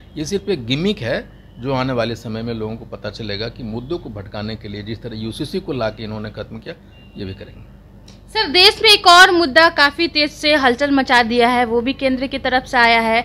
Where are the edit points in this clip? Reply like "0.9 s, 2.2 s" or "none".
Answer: none